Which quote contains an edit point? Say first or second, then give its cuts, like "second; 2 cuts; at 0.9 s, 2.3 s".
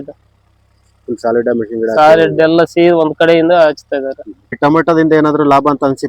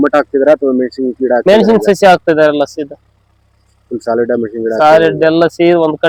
first; 1 cut; at 4.6 s